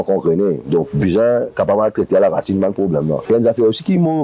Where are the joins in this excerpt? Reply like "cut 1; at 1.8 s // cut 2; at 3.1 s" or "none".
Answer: cut 1; at 3.2 s